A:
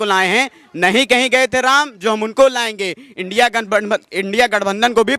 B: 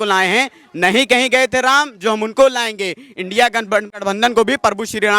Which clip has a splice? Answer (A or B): B